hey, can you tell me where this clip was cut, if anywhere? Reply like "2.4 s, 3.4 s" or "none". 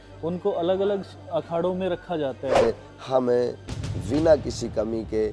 2.6 s